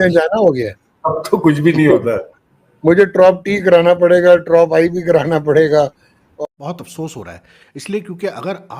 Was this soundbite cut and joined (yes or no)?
yes